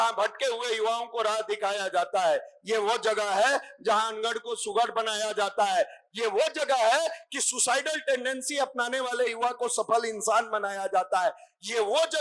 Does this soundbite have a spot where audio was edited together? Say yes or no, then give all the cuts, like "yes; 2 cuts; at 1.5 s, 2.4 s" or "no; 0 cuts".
no; 0 cuts